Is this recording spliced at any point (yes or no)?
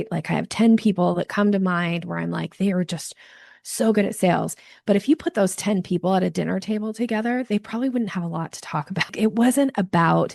yes